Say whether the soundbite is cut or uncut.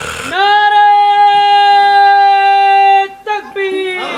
uncut